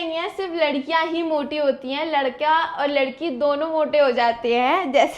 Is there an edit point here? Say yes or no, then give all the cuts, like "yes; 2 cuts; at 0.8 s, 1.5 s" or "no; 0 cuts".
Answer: no; 0 cuts